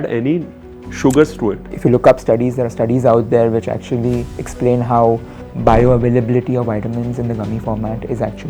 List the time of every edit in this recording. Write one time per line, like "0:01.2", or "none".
0:01.7
0:05.4